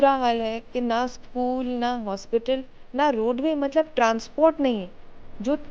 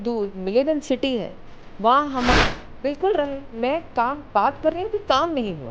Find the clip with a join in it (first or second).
second